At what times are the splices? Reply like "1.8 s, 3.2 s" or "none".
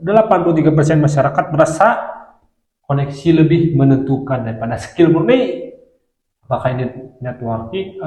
none